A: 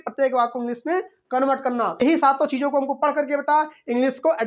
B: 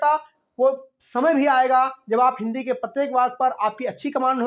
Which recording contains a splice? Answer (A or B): A